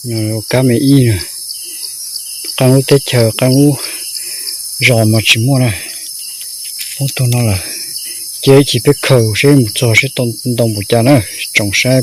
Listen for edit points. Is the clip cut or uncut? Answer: uncut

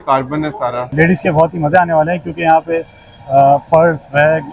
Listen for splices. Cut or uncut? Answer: cut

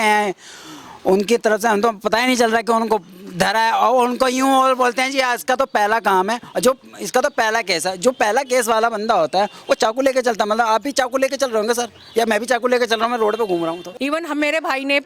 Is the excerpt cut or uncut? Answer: cut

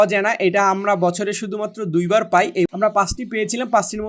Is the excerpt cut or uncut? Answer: cut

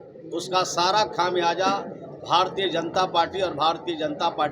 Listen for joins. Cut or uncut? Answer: uncut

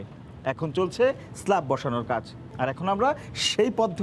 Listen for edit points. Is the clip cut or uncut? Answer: cut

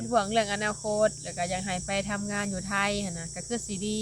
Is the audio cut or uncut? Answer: uncut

